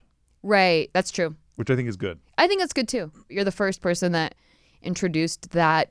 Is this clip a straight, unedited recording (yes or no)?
no